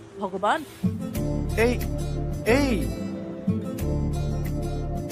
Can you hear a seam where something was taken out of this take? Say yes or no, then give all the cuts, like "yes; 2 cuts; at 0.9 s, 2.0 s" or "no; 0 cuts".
no; 0 cuts